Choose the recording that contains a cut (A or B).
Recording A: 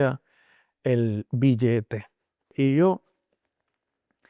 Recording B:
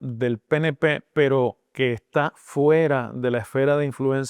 A